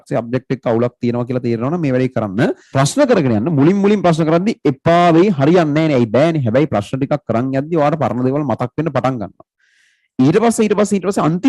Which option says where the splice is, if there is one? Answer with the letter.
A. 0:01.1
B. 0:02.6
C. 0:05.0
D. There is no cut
B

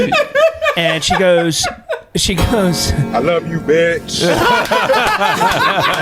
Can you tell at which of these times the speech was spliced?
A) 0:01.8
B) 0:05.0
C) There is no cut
C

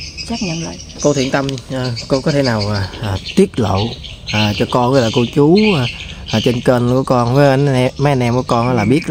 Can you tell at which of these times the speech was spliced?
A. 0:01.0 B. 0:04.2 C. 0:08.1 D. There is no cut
A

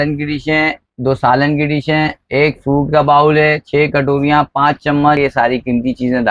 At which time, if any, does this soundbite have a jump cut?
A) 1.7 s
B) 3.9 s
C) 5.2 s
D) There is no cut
C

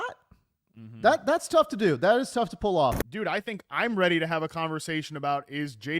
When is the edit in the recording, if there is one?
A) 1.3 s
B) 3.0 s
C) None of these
B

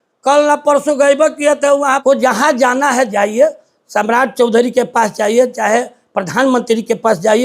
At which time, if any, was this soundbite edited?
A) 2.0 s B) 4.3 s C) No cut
A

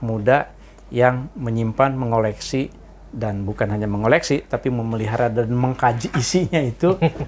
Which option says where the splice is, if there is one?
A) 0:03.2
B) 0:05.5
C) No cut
C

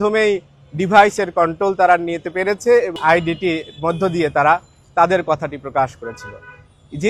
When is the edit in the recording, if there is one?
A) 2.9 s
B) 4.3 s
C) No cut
A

